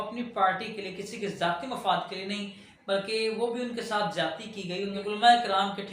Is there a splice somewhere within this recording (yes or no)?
yes